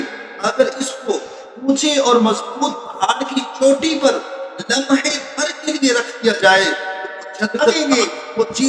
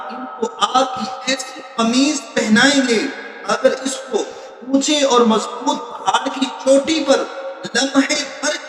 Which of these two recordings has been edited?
first; 1 cut; at 7.8 s

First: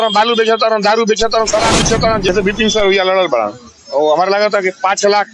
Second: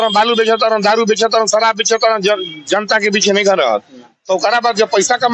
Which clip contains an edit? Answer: first; 1 cut; at 2.3 s

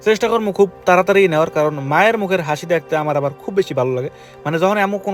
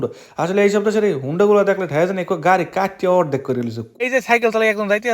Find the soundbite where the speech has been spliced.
second; 1 cut; at 4.1 s

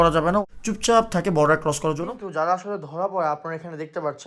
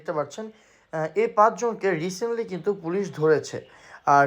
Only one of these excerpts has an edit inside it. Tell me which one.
first; 1 cut; at 2.1 s

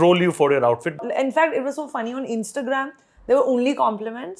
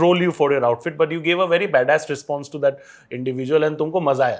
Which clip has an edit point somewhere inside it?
first; 1 cut; at 1.0 s

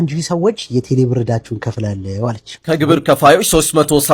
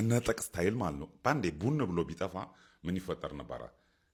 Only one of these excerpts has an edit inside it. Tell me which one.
first; 1 cut; at 2.5 s

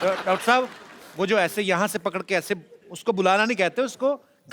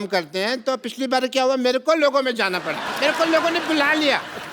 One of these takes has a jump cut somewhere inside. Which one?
second; 1 cut; at 2.8 s

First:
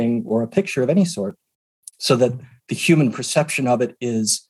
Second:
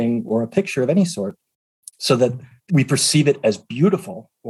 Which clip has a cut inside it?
second; 1 cut; at 2.5 s

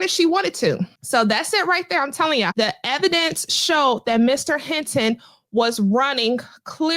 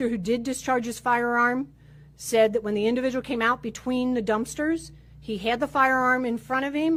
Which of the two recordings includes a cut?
first; 2 cuts; at 0.9 s, 2.5 s

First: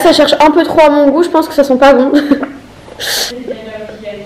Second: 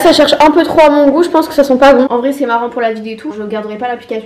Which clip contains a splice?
second; 2 cuts; at 2.1 s, 3.3 s

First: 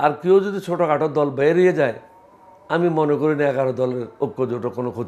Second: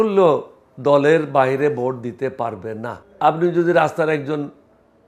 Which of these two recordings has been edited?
second; 1 cut; at 3.0 s

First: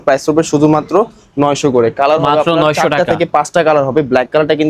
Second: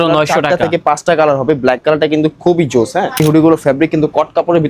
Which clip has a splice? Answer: second; 1 cut; at 3.2 s

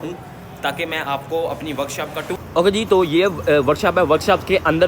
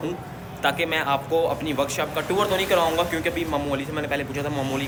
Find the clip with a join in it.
first; 1 cut; at 2.3 s

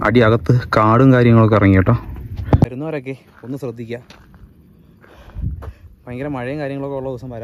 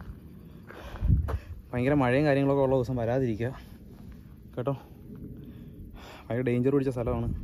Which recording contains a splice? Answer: first; 1 cut; at 2.7 s

